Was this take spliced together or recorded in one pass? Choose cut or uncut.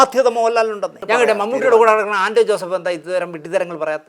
cut